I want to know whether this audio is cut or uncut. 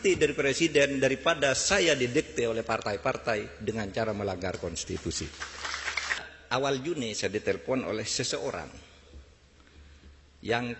cut